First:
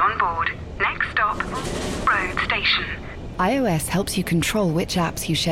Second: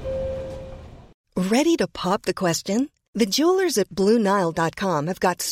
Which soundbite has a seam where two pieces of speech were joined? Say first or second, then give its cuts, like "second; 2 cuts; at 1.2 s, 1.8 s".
second; 1 cut; at 1.1 s